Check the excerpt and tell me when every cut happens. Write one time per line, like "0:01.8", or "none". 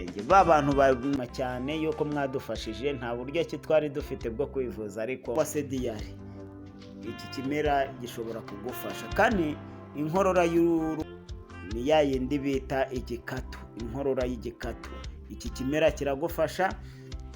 0:01.2
0:05.3
0:11.1

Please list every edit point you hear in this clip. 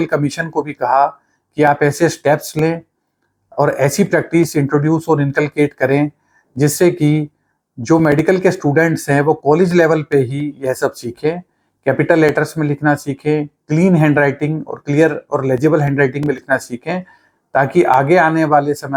none

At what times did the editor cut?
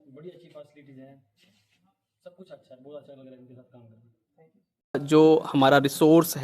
0:05.0

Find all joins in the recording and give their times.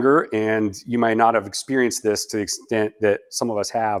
none

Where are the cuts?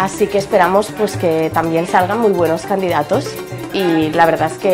none

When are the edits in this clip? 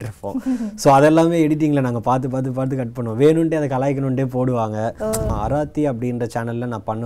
0:05.3

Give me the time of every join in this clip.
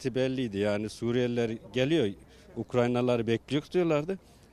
none

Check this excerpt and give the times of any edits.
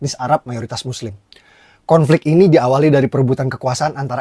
0:01.4

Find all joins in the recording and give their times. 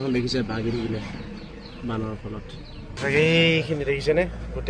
0:02.9

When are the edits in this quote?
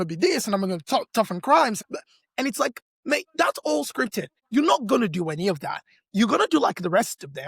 0:01.8
0:04.3

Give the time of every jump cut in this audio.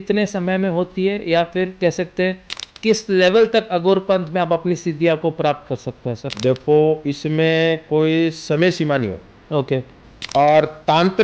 none

